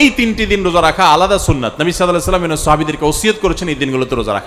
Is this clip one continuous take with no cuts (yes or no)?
yes